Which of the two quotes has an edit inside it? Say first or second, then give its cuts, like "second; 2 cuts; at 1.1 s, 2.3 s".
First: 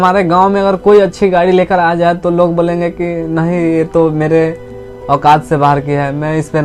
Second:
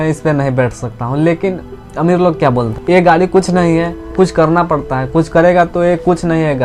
second; 2 cuts; at 2.7 s, 4.0 s